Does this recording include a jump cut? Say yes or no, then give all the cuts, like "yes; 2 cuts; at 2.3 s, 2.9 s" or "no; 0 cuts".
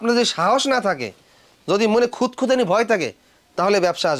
no; 0 cuts